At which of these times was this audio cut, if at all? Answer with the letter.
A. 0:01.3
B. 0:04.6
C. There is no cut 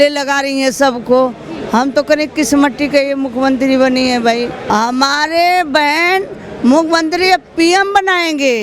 B